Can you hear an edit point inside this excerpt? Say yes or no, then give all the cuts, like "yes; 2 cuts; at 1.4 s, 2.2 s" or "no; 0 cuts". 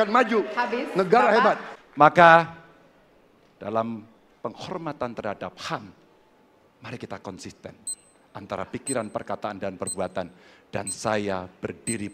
yes; 1 cut; at 1.7 s